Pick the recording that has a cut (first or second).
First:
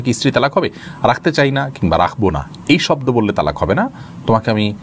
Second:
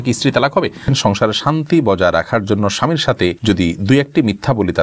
second